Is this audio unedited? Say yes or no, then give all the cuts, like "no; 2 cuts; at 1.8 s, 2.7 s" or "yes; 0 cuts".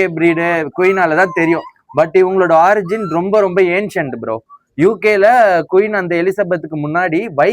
yes; 0 cuts